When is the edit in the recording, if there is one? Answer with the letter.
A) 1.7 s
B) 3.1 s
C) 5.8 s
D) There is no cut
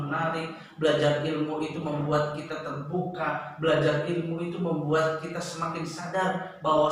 D